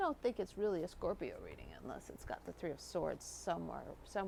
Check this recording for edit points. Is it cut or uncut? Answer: uncut